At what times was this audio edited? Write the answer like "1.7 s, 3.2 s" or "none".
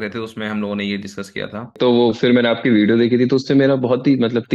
1.8 s